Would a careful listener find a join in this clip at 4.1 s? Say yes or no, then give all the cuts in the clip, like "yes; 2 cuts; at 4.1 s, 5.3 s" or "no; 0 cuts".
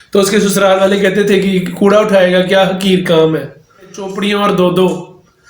yes; 1 cut; at 4.1 s